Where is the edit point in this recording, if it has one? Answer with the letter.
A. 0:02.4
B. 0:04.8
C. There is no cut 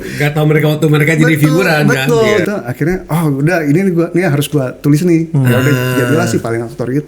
A